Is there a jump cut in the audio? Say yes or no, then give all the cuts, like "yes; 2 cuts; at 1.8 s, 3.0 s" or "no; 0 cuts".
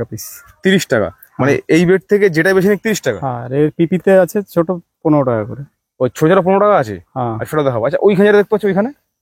no; 0 cuts